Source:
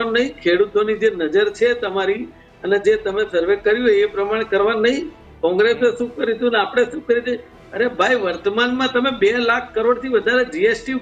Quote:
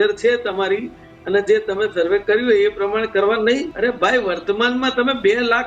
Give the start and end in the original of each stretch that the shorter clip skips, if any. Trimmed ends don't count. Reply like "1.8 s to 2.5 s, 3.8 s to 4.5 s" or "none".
5.1 s to 7.7 s